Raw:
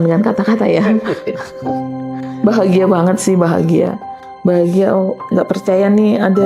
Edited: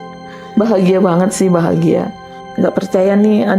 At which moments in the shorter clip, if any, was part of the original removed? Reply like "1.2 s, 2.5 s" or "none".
2.4 s

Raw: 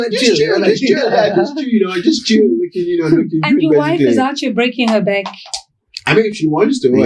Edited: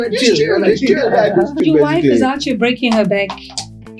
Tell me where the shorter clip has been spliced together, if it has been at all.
1.6 s

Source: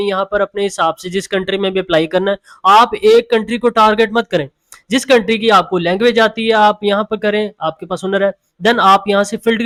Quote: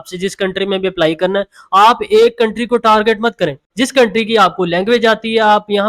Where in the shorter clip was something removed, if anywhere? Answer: 3.6 s

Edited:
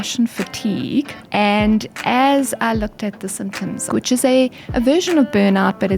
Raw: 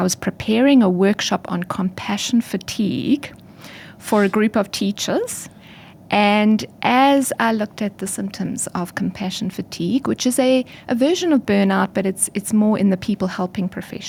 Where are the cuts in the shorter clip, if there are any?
1.2 s, 3.9 s

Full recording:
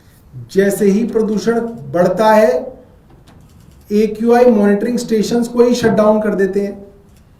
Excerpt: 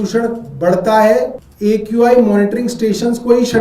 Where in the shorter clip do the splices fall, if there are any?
1.4 s

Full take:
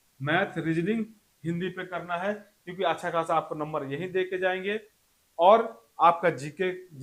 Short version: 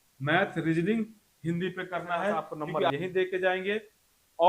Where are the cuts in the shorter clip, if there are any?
2.9 s

